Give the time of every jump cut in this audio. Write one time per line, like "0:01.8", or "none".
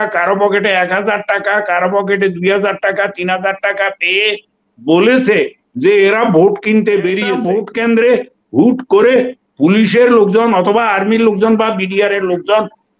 0:07.5